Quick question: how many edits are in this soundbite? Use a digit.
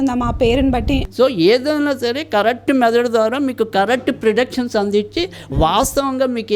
1